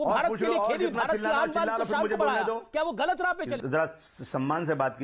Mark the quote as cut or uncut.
cut